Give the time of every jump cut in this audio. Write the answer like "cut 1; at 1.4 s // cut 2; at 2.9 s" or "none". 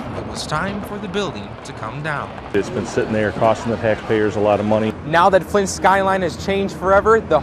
cut 1; at 5.0 s